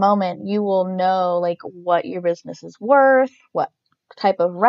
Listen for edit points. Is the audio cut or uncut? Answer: uncut